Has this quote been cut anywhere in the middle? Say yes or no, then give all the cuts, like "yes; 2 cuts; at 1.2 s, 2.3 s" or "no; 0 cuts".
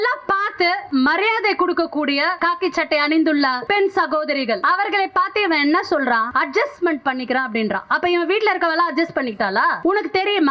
yes; 6 cuts; at 0.9 s, 2.4 s, 3.6 s, 4.6 s, 6.3 s, 9.8 s